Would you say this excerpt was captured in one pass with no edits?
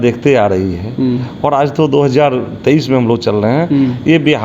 yes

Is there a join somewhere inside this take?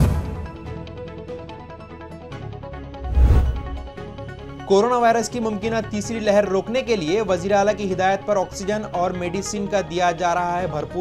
yes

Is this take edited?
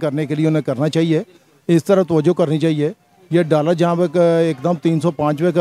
no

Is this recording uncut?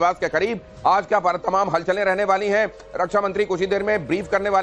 yes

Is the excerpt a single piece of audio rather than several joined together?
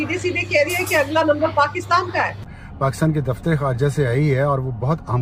yes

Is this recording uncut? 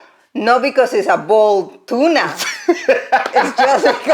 yes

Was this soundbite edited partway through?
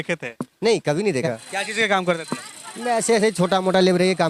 yes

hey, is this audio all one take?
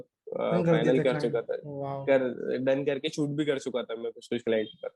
yes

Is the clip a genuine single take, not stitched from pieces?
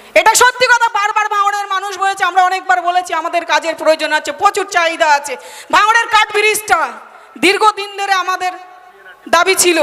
yes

